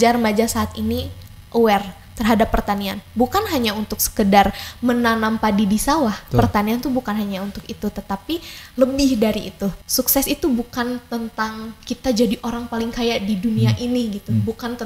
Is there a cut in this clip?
yes; 1 cut; at 9.8 s

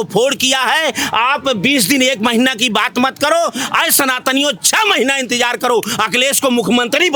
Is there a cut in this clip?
no; 0 cuts

